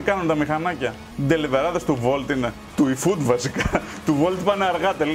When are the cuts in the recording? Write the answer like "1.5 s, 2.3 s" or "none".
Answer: 2.6 s